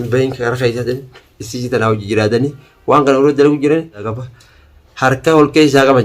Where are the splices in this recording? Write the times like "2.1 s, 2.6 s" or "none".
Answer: 4.1 s